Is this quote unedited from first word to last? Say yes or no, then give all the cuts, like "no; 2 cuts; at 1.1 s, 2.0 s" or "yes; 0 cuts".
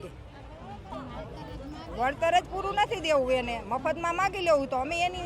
no; 1 cut; at 0.9 s